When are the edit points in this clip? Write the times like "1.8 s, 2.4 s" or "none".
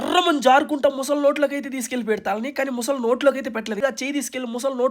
3.8 s